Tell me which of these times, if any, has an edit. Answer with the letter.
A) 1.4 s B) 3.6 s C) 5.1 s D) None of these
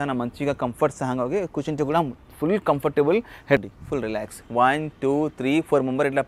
B